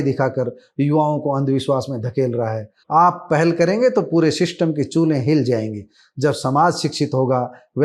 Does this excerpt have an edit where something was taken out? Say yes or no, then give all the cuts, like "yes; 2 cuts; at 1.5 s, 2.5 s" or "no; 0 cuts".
yes; 1 cut; at 2.7 s